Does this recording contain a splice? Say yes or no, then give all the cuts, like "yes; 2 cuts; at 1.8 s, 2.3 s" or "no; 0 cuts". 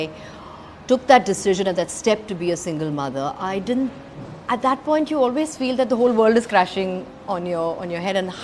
no; 0 cuts